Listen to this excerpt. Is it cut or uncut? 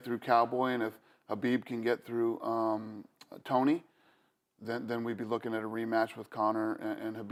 uncut